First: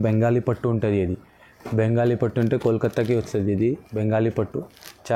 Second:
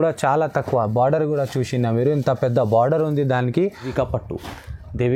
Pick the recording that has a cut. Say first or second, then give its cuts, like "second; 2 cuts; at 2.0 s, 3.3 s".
second; 1 cut; at 3.9 s